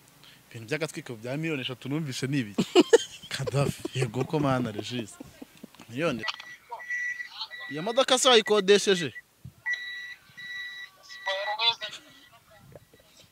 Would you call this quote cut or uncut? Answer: cut